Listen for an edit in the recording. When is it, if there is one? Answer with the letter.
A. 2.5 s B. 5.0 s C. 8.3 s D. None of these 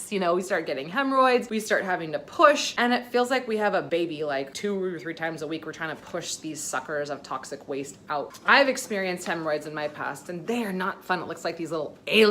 C